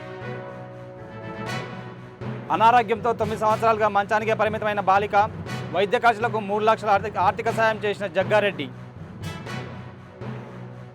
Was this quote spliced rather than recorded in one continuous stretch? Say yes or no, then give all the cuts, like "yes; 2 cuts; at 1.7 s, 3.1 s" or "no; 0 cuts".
yes; 1 cut; at 2.4 s